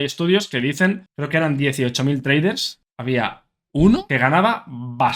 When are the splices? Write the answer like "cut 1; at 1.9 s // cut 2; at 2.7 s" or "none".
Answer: cut 1; at 1.1 s // cut 2; at 2.7 s